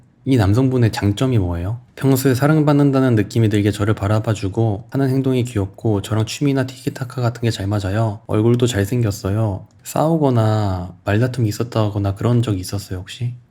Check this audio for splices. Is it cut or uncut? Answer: uncut